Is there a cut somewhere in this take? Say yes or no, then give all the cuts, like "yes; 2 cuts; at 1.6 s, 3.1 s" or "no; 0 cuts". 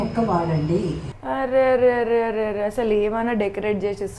yes; 1 cut; at 1.0 s